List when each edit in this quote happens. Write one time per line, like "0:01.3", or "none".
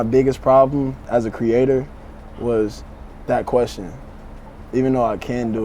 0:01.0